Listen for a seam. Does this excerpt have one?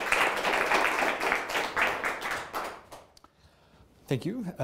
yes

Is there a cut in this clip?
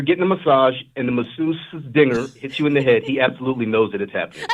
no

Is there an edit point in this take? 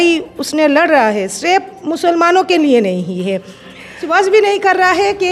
yes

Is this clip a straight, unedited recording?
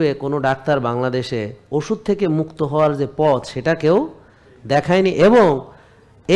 yes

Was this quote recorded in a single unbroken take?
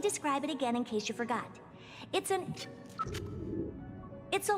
yes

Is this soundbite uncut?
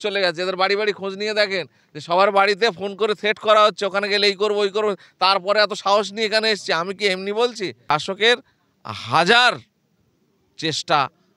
no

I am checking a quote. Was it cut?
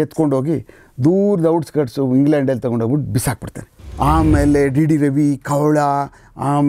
yes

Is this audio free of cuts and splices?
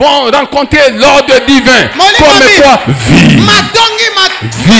yes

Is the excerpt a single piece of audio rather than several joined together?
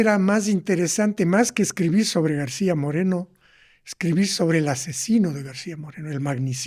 yes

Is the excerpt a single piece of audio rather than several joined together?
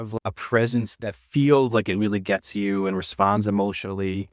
no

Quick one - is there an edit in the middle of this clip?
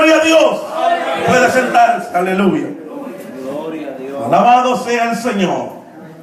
no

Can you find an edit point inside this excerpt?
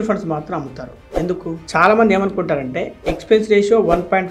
yes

